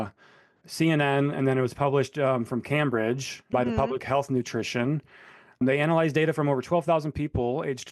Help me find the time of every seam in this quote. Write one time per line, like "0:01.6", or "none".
0:05.6